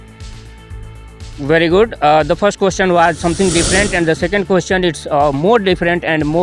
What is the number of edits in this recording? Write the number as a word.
one